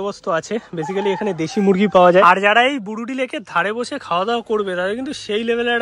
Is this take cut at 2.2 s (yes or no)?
yes